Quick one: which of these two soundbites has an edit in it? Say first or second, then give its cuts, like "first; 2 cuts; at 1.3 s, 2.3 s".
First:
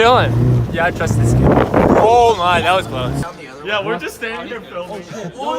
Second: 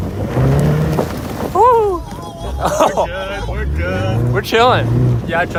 first; 1 cut; at 3.2 s